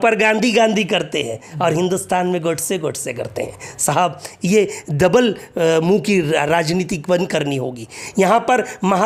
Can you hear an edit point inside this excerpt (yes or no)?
no